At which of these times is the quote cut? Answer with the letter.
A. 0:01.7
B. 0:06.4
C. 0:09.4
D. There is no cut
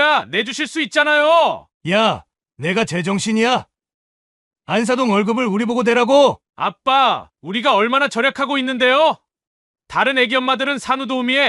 A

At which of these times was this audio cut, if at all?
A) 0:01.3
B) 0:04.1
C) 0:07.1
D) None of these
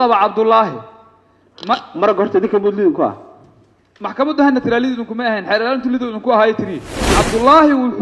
C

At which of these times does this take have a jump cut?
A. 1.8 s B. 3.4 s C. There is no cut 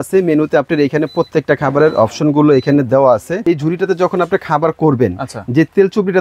B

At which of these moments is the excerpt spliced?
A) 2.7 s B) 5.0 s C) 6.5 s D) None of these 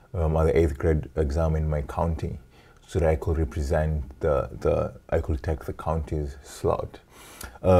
D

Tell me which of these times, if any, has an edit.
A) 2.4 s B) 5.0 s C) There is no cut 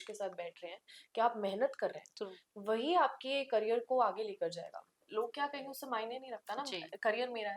B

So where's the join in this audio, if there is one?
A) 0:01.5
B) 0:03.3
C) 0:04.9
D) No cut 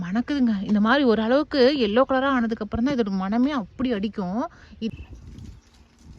C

